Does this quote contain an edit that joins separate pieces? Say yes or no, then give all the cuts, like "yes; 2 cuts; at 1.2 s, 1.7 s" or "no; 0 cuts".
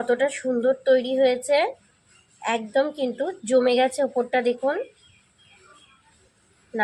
no; 0 cuts